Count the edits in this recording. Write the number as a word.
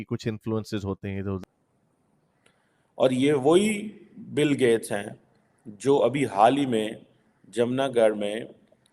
one